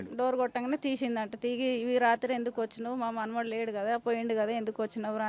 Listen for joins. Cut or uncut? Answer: uncut